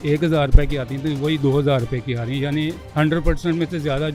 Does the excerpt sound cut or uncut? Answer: uncut